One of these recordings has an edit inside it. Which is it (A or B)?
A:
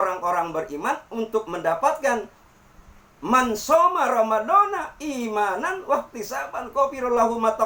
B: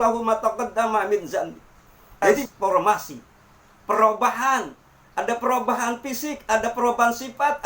B